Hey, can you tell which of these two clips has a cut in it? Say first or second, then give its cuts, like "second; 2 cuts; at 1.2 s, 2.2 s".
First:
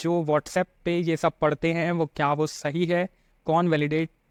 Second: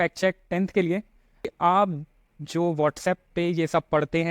second; 1 cut; at 1.5 s